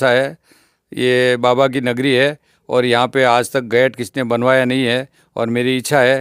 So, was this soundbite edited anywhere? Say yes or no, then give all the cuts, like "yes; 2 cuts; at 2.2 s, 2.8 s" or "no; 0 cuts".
no; 0 cuts